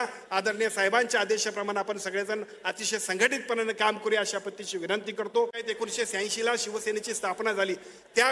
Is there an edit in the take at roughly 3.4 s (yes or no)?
no